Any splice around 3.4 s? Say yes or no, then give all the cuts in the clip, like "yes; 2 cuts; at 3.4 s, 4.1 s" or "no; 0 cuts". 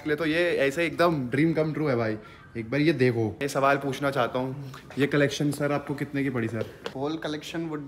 yes; 2 cuts; at 3.4 s, 6.9 s